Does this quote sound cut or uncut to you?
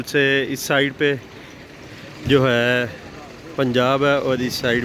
uncut